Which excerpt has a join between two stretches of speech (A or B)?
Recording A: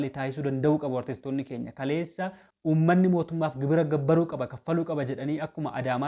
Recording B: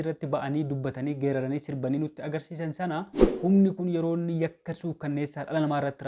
B